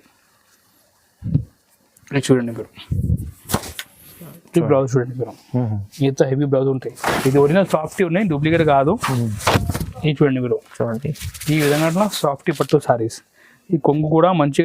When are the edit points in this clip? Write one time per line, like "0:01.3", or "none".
0:07.0